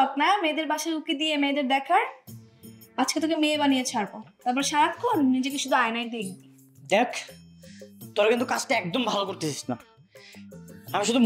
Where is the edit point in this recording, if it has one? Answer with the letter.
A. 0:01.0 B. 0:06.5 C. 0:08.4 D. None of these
D